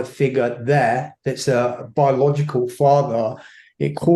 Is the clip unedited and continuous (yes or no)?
yes